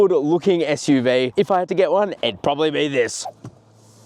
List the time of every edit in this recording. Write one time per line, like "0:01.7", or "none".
0:01.3
0:03.2